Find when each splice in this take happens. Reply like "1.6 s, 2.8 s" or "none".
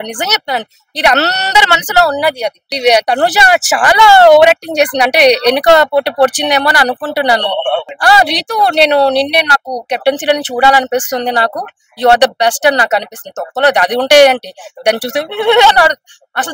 2.7 s, 7.9 s